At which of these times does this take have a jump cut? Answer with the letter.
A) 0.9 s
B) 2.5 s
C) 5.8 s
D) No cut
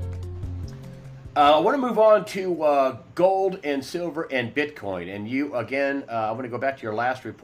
D